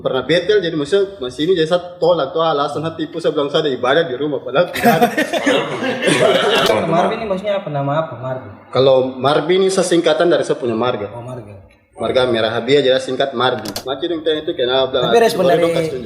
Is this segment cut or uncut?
cut